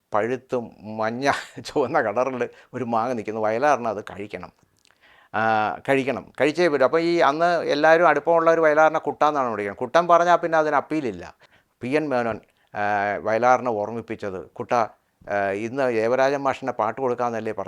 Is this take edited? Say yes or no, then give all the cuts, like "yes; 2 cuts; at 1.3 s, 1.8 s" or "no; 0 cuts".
yes; 1 cut; at 11.4 s